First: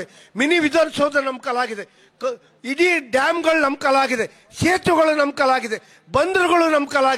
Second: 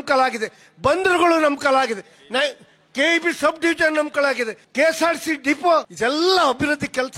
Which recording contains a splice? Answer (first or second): second